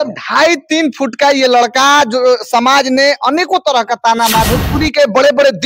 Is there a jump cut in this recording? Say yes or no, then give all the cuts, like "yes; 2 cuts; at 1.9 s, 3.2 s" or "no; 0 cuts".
yes; 1 cut; at 4.4 s